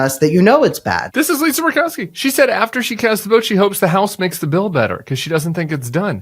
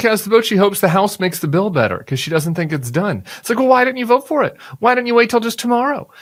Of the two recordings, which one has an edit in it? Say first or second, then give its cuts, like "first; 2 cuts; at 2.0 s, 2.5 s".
first; 1 cut; at 1.1 s